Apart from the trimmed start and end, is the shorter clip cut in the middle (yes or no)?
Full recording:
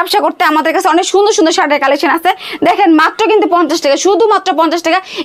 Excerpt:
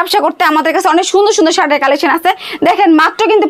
no